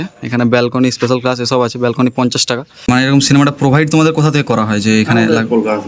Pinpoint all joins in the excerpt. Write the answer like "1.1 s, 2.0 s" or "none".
2.9 s